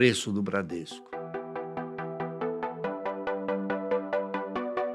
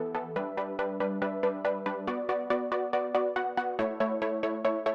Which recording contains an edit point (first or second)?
first